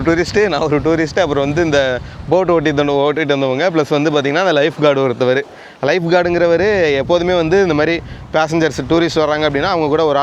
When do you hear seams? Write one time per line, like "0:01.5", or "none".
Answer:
none